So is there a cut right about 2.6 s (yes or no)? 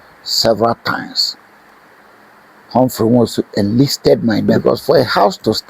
no